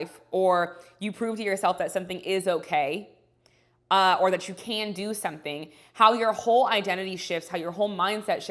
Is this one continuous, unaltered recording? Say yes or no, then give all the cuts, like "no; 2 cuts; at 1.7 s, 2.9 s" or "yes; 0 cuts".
yes; 0 cuts